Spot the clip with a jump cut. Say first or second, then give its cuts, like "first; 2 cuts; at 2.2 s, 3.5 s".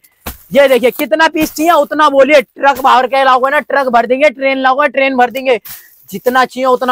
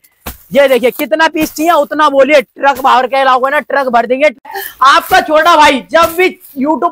second; 1 cut; at 4.5 s